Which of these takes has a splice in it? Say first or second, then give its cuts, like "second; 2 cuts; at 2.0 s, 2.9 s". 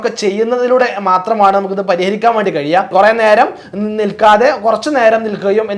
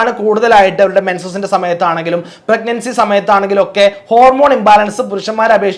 first; 1 cut; at 2.9 s